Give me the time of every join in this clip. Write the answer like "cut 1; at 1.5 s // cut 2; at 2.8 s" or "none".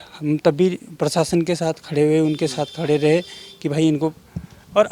none